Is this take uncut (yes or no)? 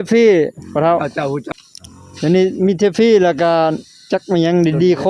yes